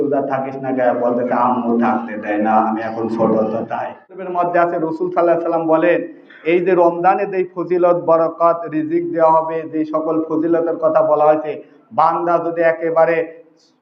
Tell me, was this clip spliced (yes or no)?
yes